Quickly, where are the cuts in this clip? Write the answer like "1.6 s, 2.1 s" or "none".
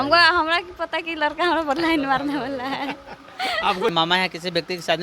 3.9 s